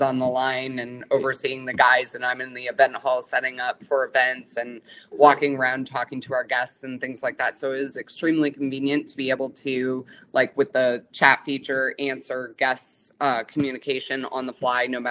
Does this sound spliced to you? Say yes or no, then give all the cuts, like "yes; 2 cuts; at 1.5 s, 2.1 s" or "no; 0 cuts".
no; 0 cuts